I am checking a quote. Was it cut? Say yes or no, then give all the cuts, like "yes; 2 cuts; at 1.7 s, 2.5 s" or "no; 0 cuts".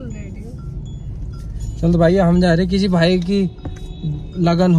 no; 0 cuts